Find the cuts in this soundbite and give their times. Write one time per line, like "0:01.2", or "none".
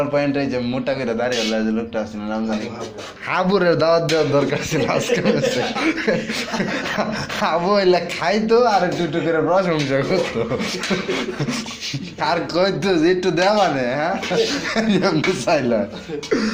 none